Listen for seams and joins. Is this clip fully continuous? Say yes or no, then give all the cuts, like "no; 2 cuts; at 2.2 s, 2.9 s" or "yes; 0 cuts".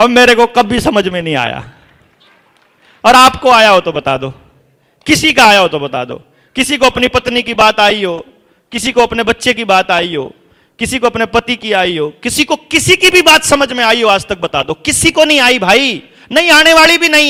yes; 0 cuts